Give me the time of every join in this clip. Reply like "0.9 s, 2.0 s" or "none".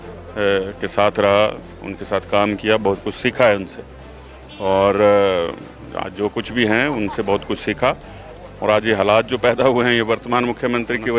none